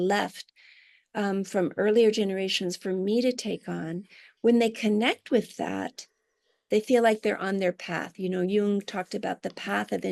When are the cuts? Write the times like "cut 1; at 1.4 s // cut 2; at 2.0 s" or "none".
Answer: none